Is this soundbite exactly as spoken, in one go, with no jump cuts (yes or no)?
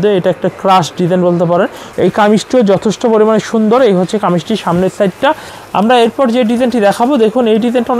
no